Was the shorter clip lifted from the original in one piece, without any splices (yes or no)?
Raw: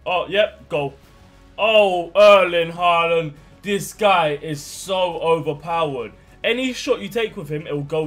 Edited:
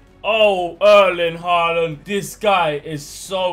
no